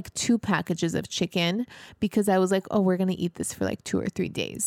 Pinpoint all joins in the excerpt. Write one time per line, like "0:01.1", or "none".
none